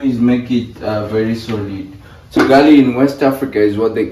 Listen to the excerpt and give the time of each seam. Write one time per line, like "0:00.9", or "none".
0:02.4